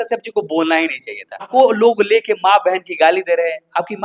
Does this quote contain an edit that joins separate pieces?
yes; 1 cut; at 1.5 s

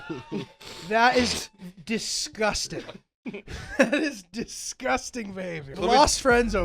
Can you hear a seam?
yes; 1 cut; at 5.7 s

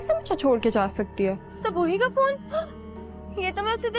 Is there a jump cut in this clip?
yes; 1 cut; at 1.5 s

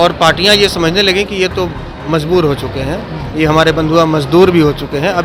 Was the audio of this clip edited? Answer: no; 0 cuts

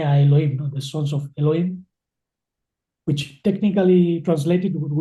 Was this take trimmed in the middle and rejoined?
no; 0 cuts

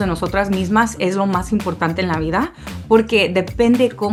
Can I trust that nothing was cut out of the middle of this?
yes; 0 cuts

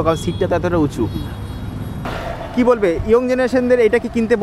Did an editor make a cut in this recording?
yes; 1 cut; at 2.1 s

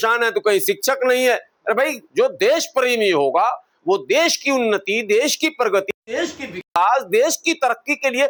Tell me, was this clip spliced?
no; 0 cuts

